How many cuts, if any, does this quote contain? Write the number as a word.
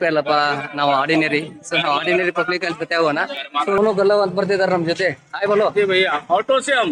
one